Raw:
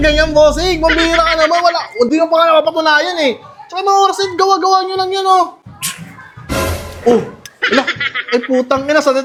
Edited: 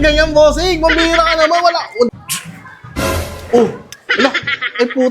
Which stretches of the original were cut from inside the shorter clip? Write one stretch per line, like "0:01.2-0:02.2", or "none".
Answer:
0:02.1-0:05.6